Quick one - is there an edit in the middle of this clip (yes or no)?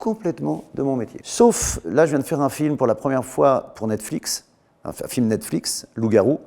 yes